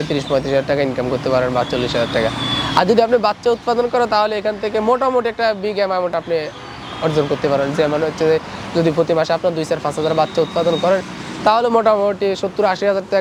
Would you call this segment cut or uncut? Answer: uncut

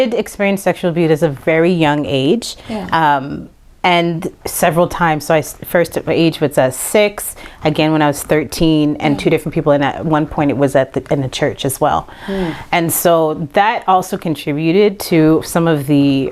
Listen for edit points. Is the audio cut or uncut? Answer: uncut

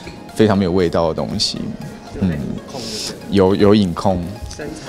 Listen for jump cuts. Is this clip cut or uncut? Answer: uncut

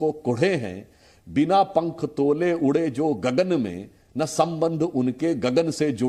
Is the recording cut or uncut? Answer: uncut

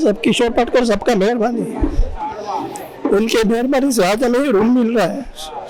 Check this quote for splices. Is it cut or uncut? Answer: uncut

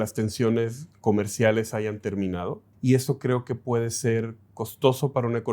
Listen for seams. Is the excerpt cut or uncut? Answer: cut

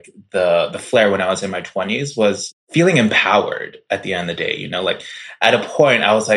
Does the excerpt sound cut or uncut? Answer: cut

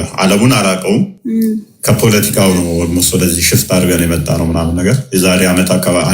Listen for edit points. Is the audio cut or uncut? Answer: uncut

